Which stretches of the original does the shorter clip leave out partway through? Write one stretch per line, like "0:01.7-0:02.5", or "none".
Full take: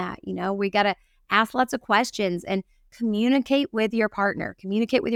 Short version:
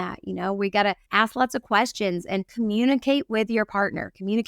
0:01.0-0:01.2
0:02.7-0:02.9